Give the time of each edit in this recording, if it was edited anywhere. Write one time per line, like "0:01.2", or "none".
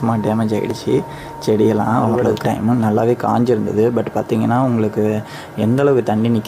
0:02.2